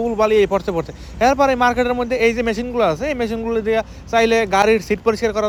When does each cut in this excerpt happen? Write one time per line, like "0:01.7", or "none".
none